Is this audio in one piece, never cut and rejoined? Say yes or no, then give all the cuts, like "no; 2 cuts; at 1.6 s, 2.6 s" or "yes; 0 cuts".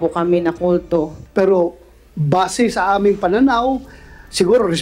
no; 1 cut; at 1.2 s